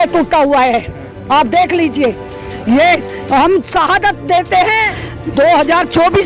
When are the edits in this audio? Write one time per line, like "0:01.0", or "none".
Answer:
0:04.9